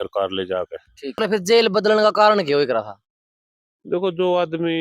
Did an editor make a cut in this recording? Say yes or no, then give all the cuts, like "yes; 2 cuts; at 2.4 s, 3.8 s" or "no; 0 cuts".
yes; 1 cut; at 1.2 s